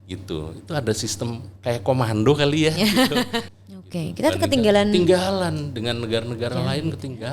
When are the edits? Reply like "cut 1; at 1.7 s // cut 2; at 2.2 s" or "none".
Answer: cut 1; at 3.4 s